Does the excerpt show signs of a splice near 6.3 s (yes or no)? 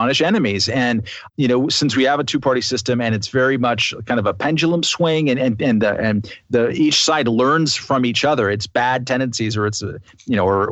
no